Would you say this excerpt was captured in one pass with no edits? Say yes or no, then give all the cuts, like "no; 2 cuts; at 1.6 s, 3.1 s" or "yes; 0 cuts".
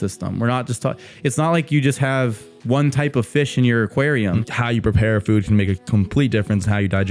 no; 1 cut; at 4.4 s